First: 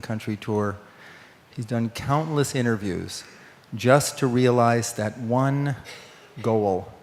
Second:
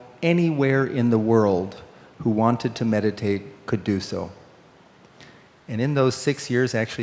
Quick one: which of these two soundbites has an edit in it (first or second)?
second